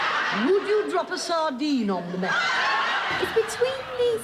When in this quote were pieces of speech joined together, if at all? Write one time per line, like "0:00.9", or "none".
0:03.2